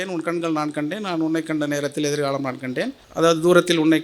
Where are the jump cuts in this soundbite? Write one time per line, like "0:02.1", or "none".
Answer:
0:03.0